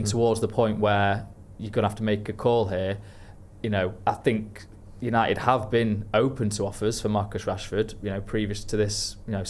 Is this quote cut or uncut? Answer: uncut